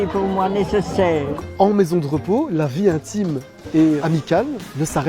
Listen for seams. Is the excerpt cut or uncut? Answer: cut